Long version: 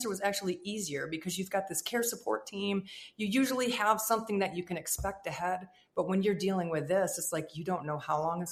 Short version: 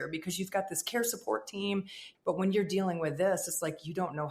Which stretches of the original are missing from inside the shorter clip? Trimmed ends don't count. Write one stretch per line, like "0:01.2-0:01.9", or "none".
0:03.0-0:05.7